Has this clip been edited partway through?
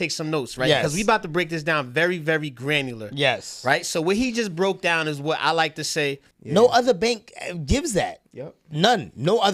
yes; 1 cut; at 6.3 s

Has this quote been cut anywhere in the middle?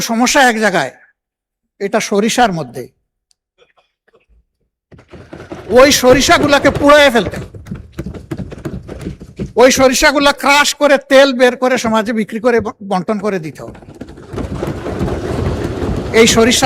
no; 0 cuts

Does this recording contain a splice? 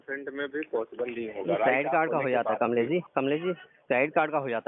yes; 1 cut; at 3.1 s

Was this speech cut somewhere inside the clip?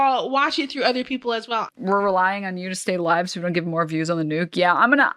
yes; 1 cut; at 1.7 s

